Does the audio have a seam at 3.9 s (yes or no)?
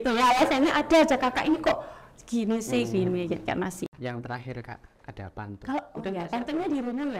yes